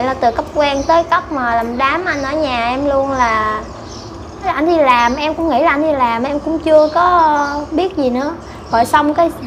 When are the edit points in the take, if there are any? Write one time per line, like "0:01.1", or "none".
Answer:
0:04.5